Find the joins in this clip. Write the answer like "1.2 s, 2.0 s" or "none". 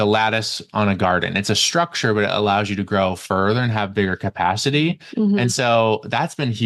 none